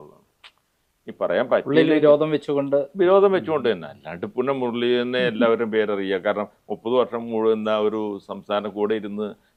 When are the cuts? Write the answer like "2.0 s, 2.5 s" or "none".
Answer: none

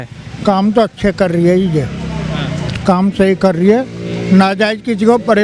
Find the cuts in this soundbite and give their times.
none

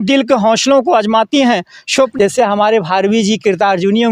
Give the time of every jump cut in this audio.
2.1 s

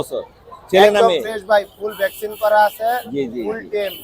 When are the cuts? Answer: none

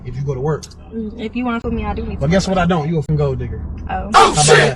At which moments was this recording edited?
1.6 s, 3.1 s

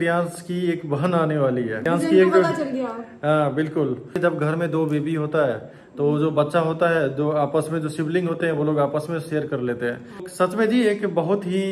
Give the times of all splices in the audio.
1.9 s, 4.1 s, 10.2 s

